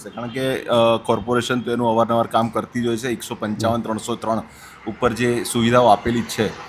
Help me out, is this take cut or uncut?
uncut